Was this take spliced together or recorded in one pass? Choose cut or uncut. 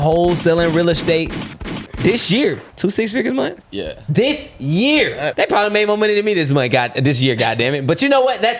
cut